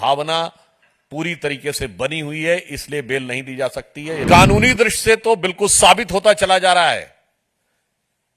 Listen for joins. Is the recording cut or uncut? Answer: cut